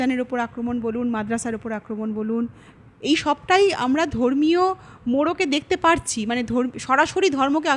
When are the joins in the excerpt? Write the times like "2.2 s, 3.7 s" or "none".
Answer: none